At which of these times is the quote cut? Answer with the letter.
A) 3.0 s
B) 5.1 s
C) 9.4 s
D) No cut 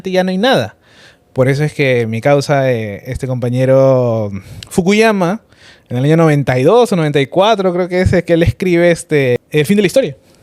C